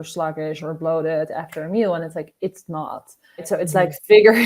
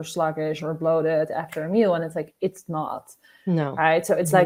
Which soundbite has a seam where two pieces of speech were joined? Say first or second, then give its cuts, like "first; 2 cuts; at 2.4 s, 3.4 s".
first; 1 cut; at 3.4 s